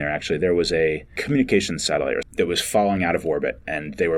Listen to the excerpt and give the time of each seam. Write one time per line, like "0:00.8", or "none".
0:01.1
0:02.3

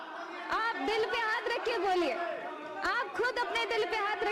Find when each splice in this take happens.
none

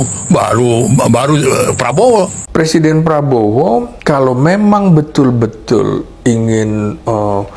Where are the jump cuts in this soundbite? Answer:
0:02.4

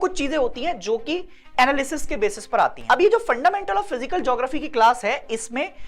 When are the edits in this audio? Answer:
0:02.8

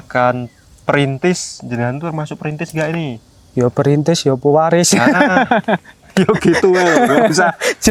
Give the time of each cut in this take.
none

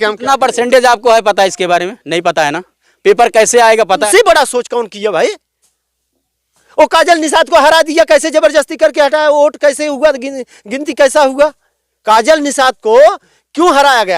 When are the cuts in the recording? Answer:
0:04.0

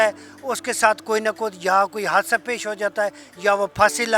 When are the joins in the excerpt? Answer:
none

